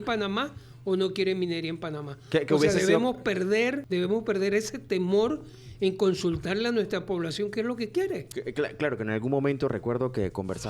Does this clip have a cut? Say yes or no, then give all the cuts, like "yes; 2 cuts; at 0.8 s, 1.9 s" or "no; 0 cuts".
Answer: yes; 2 cuts; at 3.8 s, 8.3 s